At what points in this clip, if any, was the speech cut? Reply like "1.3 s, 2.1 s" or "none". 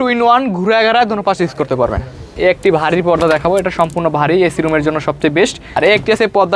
2.2 s, 5.6 s